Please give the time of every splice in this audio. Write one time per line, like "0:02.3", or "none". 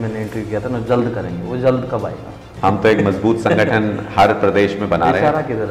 0:02.5